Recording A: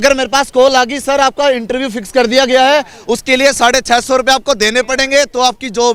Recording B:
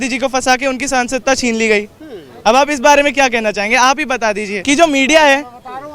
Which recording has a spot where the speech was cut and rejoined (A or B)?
B